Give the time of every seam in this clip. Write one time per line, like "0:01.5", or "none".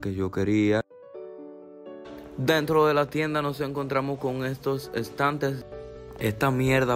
0:00.9
0:05.6